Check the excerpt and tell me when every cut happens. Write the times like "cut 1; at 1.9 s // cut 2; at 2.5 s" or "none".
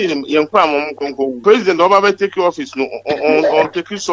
cut 1; at 1.4 s